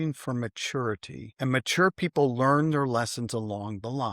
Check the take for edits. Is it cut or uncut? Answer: cut